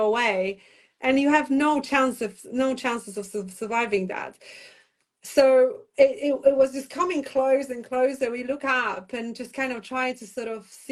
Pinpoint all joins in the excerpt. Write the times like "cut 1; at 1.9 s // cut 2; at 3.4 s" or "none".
none

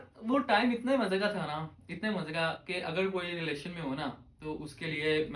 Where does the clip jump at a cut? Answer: none

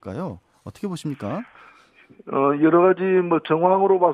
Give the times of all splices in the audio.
cut 1; at 3.0 s

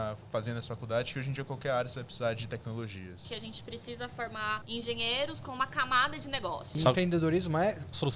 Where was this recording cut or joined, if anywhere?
cut 1; at 3.2 s // cut 2; at 4.6 s // cut 3; at 6.7 s

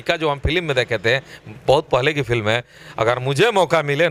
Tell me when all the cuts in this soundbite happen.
none

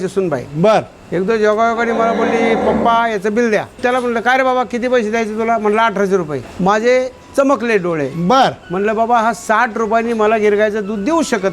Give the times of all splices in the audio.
cut 1; at 3.7 s // cut 2; at 6.4 s

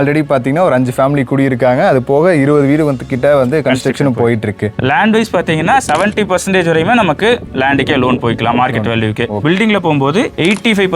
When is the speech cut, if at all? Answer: cut 1; at 4.8 s // cut 2; at 9.4 s

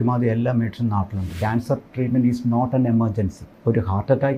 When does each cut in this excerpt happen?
cut 1; at 1.2 s // cut 2; at 3.4 s

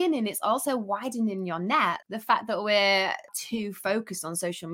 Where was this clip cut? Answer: cut 1; at 2.1 s // cut 2; at 3.3 s

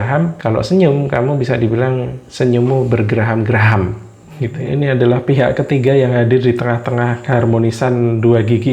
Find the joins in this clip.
cut 1; at 4.5 s

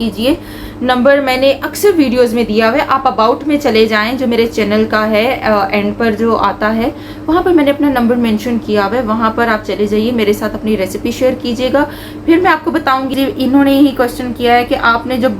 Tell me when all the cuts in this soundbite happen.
cut 1; at 13.1 s

